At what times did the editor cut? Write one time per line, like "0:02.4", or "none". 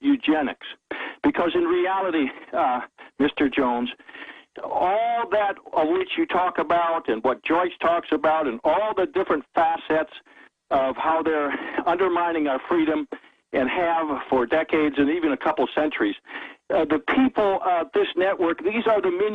0:13.1